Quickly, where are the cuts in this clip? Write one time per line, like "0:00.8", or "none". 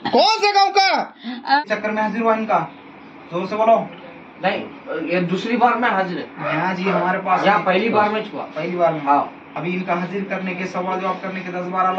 0:01.6